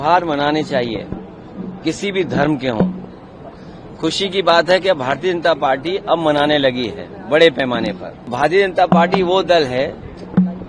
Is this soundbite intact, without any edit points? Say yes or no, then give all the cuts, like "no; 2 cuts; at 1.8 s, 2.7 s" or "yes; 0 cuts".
no; 1 cut; at 8.3 s